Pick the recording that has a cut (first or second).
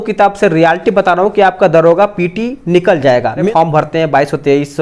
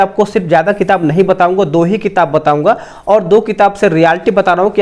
first